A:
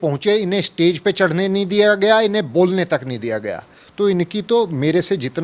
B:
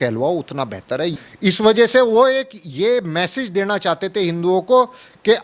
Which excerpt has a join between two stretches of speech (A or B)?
B